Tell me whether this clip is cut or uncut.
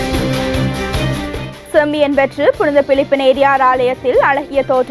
cut